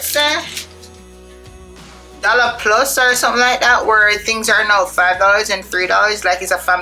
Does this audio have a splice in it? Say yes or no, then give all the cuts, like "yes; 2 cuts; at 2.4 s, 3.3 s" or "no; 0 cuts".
no; 0 cuts